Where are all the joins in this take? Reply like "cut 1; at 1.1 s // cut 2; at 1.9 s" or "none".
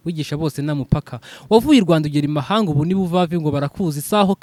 none